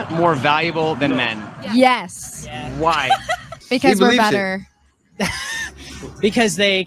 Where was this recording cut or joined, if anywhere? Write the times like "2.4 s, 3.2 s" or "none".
3.6 s